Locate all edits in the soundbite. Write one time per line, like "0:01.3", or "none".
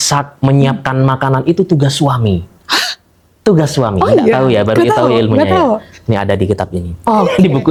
none